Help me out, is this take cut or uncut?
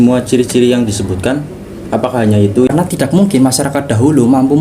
cut